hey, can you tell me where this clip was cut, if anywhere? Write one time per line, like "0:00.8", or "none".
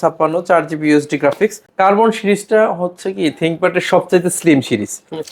0:01.6